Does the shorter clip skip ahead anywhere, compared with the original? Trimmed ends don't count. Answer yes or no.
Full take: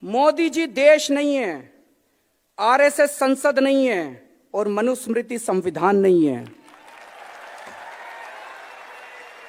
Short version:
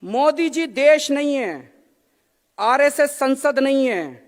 no